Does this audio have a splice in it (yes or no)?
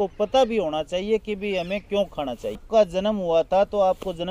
yes